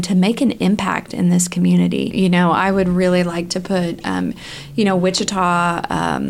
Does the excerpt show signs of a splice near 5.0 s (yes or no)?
no